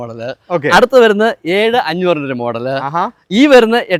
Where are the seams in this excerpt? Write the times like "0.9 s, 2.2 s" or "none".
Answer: none